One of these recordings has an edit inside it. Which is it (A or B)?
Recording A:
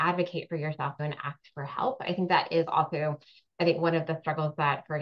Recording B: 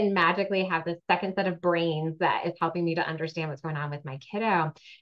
A